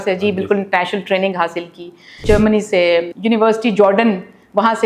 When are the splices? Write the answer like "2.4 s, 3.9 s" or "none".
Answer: 2.2 s, 3.2 s